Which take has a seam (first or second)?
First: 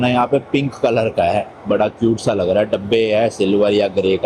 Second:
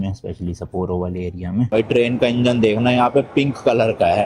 second